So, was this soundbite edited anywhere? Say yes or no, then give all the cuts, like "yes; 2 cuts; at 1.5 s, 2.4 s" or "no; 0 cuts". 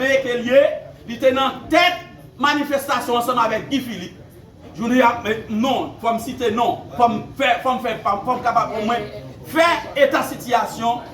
no; 0 cuts